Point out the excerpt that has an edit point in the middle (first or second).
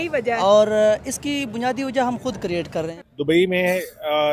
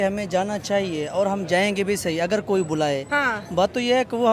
first